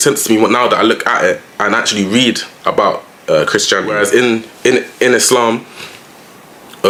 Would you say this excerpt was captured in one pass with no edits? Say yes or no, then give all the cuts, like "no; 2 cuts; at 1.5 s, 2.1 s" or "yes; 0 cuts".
yes; 0 cuts